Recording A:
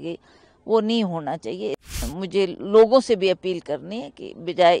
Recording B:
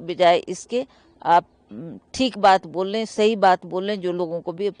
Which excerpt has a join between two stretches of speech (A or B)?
A